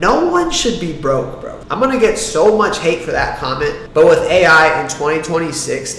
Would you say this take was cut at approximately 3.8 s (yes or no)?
no